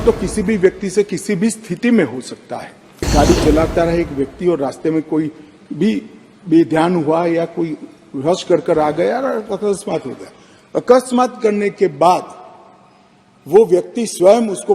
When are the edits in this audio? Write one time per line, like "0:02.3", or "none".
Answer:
0:03.1